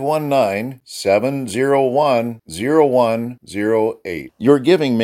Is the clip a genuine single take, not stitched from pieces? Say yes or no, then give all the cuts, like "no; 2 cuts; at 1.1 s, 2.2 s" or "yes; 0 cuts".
yes; 0 cuts